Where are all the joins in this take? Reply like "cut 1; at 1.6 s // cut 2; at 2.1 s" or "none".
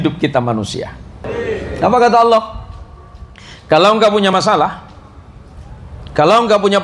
cut 1; at 1.1 s

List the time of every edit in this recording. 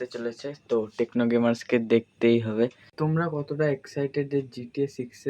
cut 1; at 2.8 s

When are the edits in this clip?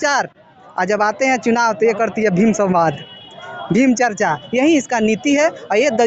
none

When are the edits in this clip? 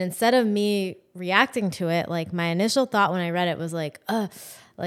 none

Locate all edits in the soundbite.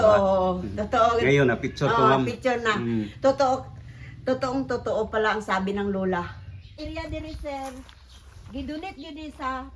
cut 1; at 6.8 s

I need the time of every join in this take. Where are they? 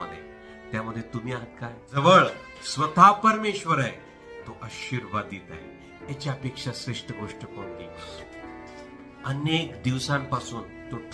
cut 1; at 2.0 s // cut 2; at 8.2 s

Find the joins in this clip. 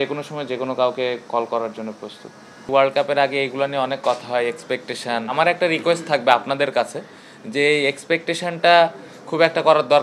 cut 1; at 2.6 s // cut 2; at 5.3 s

